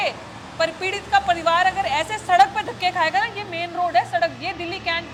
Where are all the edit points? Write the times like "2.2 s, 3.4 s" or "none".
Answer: none

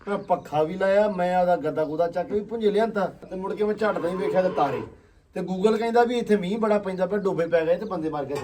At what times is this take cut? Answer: 3.3 s

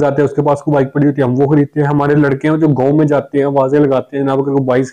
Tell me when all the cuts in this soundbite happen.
none

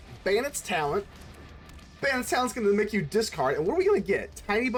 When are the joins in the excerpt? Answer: none

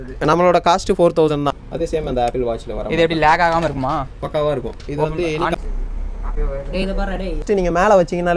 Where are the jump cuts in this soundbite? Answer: 1.6 s, 5.6 s, 7.4 s

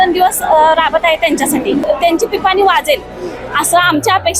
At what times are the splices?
1.9 s

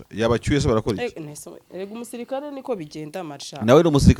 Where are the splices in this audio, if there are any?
none

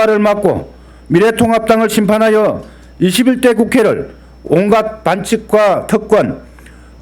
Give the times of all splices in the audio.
4.3 s

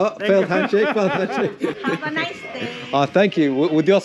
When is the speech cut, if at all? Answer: 1.8 s

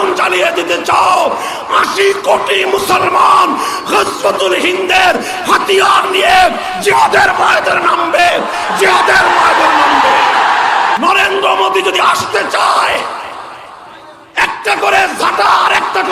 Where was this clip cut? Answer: 11.0 s

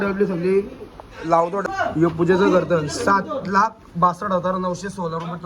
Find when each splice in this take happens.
1.6 s

